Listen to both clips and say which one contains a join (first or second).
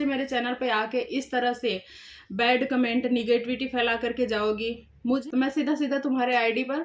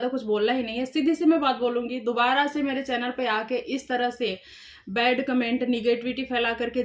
first